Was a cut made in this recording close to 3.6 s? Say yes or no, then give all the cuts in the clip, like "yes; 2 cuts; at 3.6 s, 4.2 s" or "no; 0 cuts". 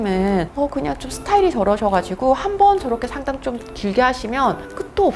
no; 0 cuts